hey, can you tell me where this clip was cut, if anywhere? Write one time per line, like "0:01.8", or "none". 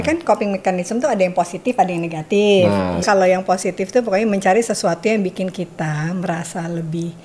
0:03.0

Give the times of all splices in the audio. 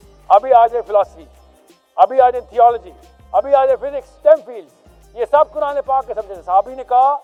none

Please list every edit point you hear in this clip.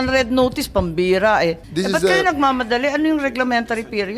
0:01.6

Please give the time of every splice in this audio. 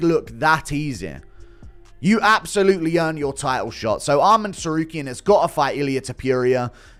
none

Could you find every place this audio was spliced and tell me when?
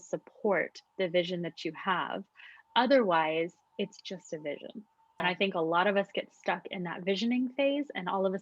0:05.2

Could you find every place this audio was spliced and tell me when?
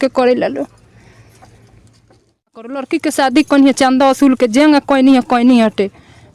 0:02.8

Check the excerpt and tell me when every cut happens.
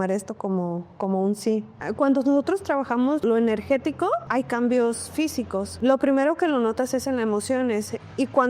0:01.8
0:03.2

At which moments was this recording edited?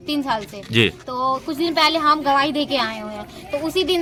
none

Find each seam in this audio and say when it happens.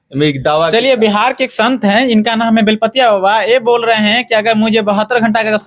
none

